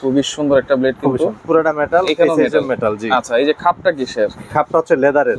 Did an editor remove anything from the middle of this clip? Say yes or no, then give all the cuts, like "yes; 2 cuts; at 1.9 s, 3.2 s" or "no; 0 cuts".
yes; 1 cut; at 1.4 s